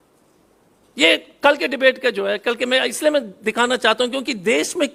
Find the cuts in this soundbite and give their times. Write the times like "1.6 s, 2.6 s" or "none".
none